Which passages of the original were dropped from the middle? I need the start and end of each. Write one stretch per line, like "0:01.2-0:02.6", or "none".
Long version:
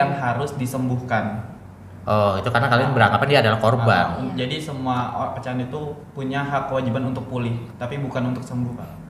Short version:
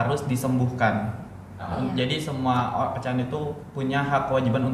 0:02.0-0:04.1